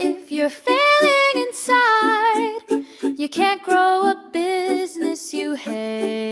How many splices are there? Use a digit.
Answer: 0